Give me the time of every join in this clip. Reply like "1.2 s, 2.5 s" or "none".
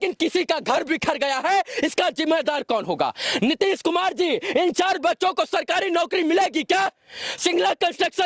none